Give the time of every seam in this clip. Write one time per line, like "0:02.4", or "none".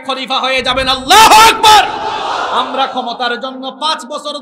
none